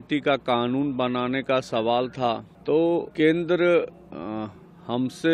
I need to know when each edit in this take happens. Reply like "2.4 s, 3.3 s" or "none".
2.5 s, 3.1 s